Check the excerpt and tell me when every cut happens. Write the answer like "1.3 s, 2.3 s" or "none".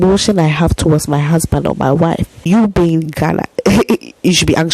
2.5 s